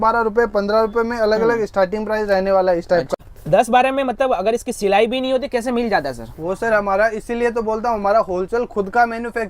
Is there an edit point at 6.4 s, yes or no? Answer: no